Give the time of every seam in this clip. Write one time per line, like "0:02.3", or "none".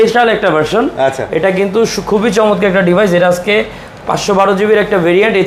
none